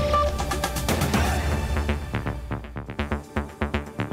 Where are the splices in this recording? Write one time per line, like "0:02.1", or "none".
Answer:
0:02.9